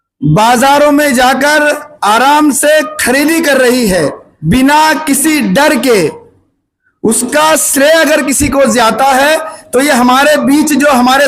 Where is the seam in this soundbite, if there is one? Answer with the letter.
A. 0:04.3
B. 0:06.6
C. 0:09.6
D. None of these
A